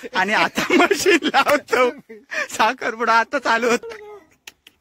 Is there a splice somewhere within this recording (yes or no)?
yes